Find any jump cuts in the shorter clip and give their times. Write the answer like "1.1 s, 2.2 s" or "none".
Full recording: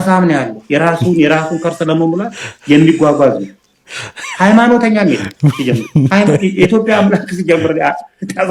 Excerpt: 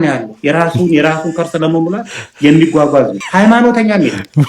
3.2 s